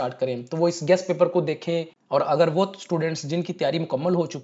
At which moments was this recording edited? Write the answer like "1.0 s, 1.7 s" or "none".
1.9 s